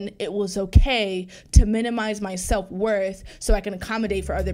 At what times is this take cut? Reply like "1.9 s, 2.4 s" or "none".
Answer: none